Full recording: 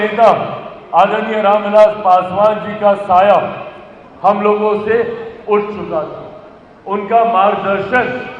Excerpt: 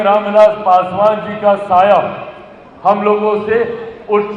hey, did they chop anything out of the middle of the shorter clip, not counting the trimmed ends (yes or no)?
no